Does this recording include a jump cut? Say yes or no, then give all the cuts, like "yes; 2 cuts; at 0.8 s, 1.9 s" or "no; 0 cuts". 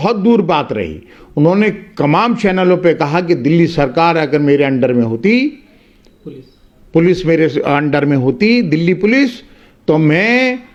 no; 0 cuts